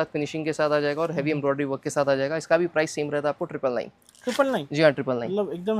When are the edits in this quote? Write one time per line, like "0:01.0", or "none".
none